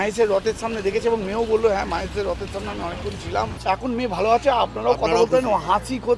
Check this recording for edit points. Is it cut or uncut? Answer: cut